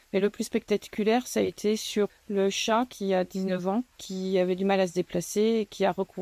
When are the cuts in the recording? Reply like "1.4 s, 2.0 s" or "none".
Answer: 2.1 s, 4.1 s